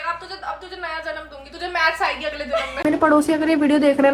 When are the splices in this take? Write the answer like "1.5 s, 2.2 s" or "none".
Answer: 2.8 s